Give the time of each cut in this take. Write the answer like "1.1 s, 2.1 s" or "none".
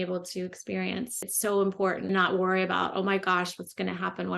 1.2 s, 2.1 s